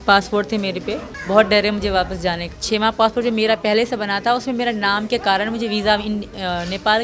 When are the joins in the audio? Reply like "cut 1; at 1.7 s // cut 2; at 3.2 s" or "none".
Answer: cut 1; at 1.1 s // cut 2; at 2.5 s